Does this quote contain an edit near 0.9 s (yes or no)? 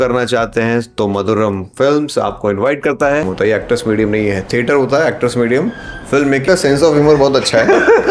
no